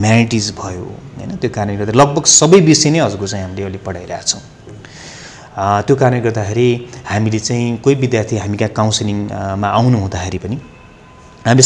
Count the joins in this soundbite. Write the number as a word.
zero